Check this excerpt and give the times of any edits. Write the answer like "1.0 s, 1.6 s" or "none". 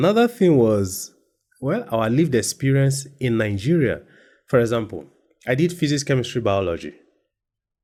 none